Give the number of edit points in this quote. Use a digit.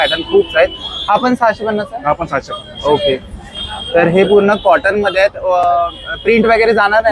0